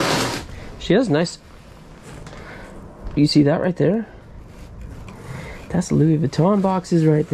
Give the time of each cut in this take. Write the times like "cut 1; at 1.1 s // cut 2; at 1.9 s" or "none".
none

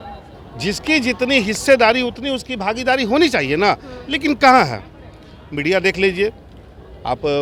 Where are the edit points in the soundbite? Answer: none

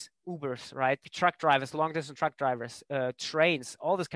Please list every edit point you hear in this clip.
cut 1; at 1.1 s

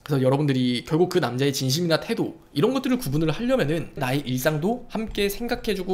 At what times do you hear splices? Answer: cut 1; at 4.0 s

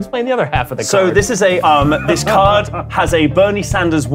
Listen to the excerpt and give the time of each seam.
cut 1; at 1.6 s

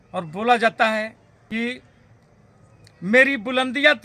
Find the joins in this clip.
cut 1; at 1.3 s

